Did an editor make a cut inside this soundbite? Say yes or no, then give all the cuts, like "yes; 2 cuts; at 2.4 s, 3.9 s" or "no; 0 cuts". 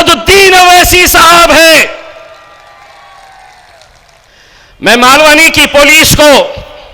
yes; 1 cut; at 4.3 s